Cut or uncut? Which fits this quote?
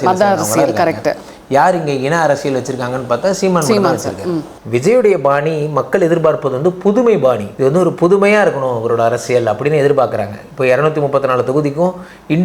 cut